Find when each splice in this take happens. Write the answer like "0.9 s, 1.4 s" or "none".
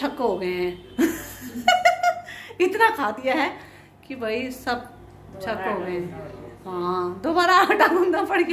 none